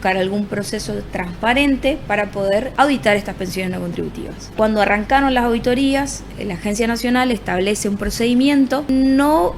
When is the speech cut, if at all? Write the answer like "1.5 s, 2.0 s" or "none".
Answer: 2.7 s, 4.4 s, 8.9 s